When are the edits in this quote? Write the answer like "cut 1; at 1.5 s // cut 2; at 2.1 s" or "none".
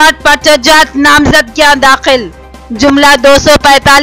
none

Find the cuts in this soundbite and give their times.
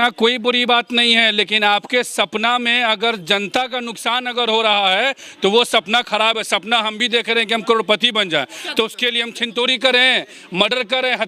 none

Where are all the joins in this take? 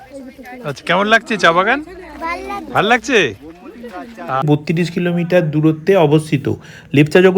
cut 1; at 4.4 s

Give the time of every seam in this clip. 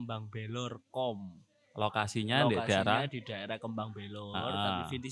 none

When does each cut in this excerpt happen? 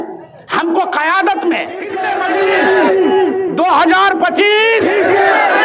cut 1; at 2.0 s

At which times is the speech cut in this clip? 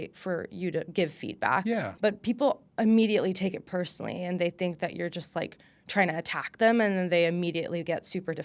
cut 1; at 1.9 s

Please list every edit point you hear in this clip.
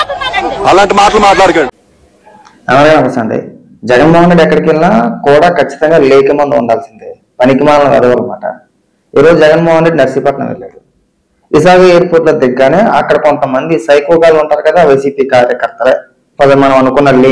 cut 1; at 1.5 s

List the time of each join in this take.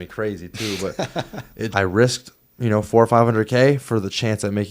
cut 1; at 1.7 s

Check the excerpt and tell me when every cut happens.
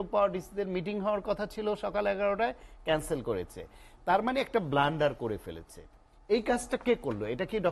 none

